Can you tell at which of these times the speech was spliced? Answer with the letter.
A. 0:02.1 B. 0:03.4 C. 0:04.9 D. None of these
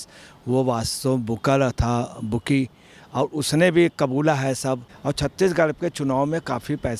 C